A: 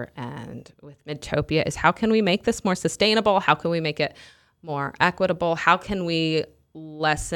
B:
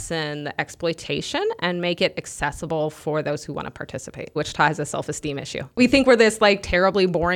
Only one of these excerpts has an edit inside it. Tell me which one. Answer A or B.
B